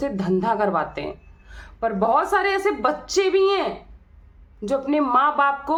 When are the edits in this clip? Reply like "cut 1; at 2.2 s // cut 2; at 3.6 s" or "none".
none